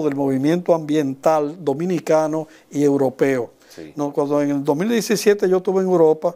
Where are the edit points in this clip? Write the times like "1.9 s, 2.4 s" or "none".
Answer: none

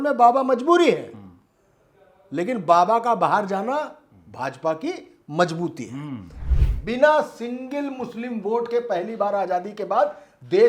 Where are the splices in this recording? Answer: 6.4 s

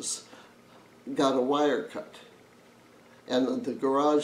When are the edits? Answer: none

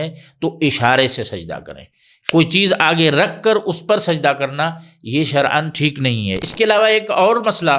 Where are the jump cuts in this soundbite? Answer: 6.4 s

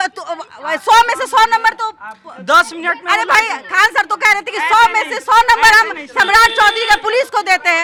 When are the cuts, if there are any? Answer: none

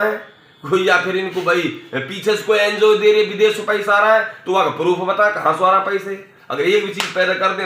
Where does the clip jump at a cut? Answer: none

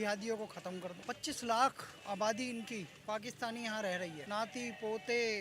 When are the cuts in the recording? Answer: 0.9 s, 4.2 s

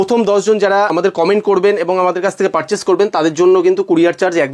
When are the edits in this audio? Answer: 0.9 s

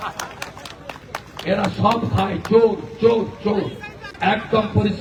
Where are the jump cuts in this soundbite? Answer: none

